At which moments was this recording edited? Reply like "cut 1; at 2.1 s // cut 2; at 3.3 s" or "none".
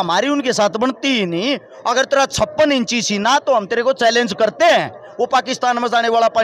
none